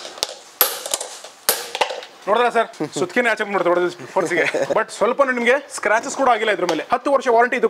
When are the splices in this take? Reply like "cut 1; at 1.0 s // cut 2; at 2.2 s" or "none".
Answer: none